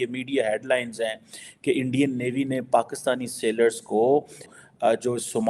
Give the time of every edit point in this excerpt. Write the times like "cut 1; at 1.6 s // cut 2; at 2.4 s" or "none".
cut 1; at 4.5 s